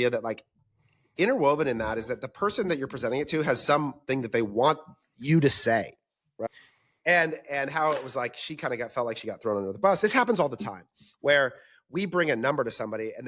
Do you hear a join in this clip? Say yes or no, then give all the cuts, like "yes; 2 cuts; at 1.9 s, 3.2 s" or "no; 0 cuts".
yes; 1 cut; at 10.0 s